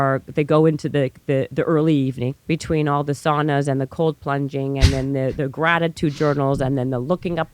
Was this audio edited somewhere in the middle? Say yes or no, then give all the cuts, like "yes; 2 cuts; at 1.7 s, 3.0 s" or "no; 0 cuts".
yes; 1 cut; at 2.4 s